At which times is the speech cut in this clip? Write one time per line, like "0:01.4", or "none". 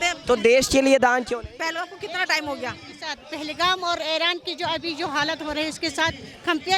none